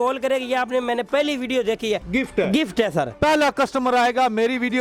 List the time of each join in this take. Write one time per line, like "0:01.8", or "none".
0:02.0
0:03.1